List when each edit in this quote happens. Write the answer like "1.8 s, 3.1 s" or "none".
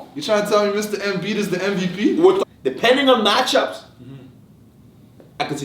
2.4 s